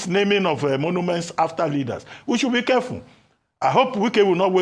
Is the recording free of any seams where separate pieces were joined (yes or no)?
yes